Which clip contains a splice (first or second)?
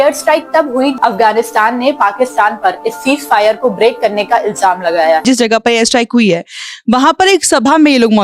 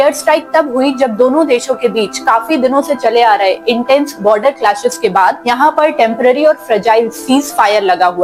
first